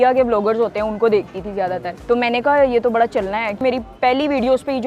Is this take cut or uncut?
cut